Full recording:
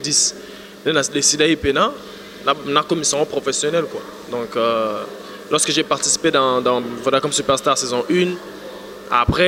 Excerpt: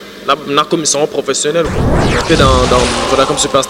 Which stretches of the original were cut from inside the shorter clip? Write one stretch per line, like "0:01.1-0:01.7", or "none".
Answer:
0:04.4-0:06.2

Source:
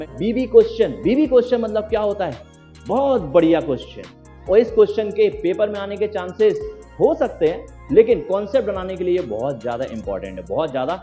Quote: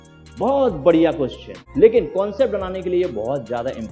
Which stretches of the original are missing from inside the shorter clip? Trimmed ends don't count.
0:04.1-0:07.7

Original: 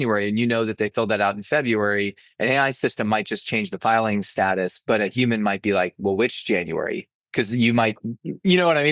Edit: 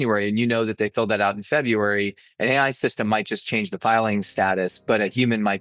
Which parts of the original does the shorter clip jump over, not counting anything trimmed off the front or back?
none

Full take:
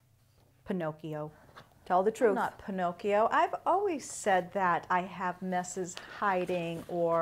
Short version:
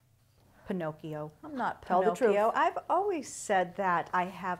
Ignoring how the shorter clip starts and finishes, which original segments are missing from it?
0:02.3-0:03.1

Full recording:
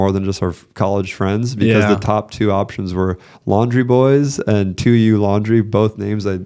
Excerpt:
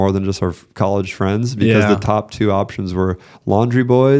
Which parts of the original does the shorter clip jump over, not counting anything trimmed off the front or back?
none

